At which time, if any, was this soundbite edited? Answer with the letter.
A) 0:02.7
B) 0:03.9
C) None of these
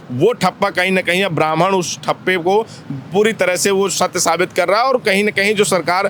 C